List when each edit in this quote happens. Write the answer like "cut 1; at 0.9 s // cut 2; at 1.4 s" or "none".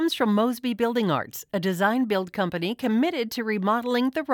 none